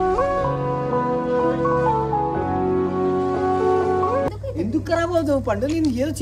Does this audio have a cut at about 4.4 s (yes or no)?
no